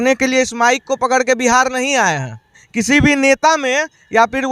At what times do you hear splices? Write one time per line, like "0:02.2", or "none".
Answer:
0:02.6